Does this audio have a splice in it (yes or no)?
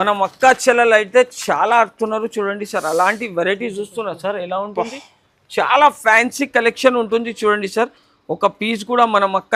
no